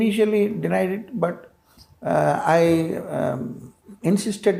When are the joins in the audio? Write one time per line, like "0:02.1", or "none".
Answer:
none